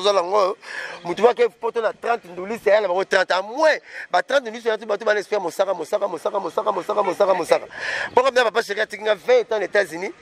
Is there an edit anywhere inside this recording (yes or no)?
no